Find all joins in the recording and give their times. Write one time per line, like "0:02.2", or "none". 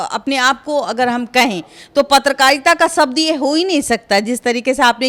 none